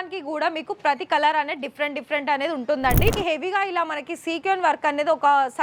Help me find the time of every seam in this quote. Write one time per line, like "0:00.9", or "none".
0:03.1